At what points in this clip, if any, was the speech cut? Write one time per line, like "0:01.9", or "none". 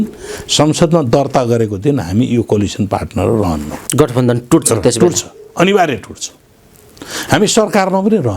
0:03.8